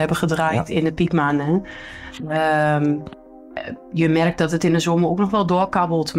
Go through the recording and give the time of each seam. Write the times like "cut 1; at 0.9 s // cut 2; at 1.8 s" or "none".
none